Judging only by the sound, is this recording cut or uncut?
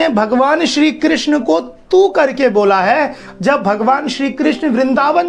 uncut